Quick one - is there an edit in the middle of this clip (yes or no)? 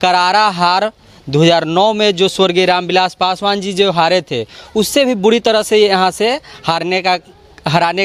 no